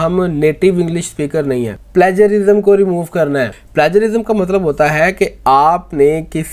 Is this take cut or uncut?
cut